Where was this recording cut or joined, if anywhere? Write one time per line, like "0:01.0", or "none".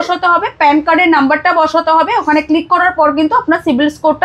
none